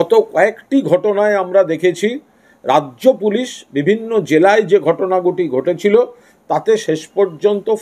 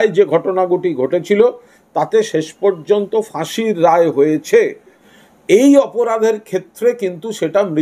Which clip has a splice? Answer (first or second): second